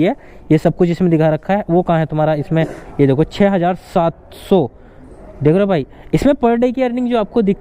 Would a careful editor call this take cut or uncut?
cut